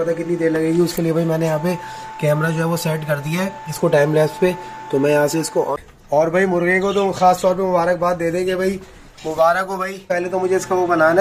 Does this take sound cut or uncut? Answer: cut